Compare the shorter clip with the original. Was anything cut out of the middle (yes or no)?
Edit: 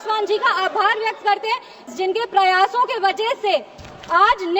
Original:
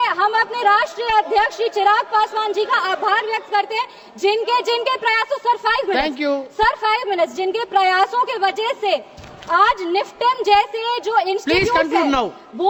yes